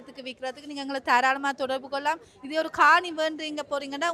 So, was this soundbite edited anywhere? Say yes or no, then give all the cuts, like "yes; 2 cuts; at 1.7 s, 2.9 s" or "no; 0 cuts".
no; 0 cuts